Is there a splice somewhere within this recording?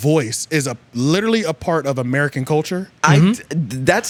no; 0 cuts

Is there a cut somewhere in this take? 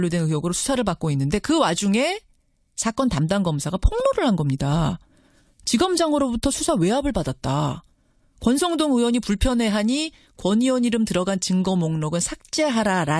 yes; 1 cut; at 8.0 s

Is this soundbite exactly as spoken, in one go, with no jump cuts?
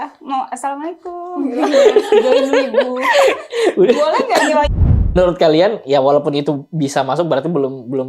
no; 1 cut; at 4.8 s

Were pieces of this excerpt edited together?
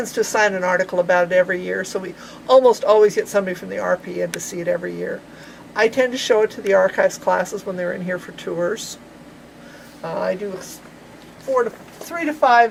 no; 0 cuts

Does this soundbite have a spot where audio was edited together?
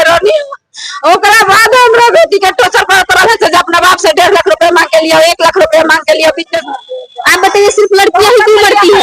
yes; 1 cut; at 6.5 s

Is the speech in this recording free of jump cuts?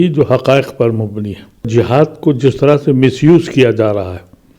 no; 1 cut; at 1.7 s

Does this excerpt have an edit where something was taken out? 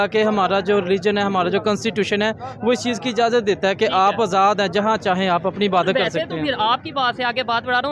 no; 0 cuts

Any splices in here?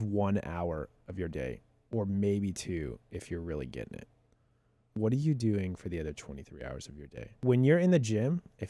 yes; 1 cut; at 7.4 s

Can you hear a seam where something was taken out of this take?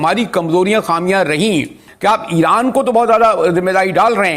yes; 1 cut; at 1.8 s

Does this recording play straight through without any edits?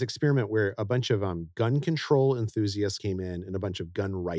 no; 1 cut; at 3.0 s

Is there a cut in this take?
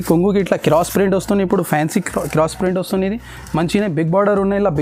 no; 0 cuts

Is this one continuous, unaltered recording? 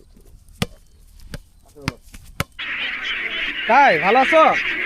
no; 1 cut; at 2.6 s

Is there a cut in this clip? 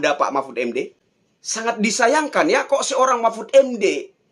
no; 0 cuts

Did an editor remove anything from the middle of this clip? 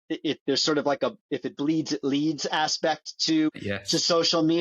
yes; 1 cut; at 3.5 s

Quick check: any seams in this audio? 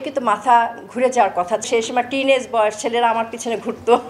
yes; 1 cut; at 1.7 s

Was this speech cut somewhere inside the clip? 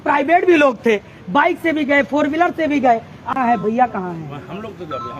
yes; 1 cut; at 3.3 s

